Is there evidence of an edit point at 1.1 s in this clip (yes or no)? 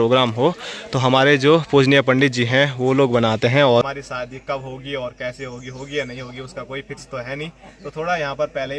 no